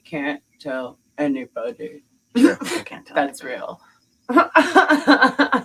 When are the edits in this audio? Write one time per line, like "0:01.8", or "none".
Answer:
none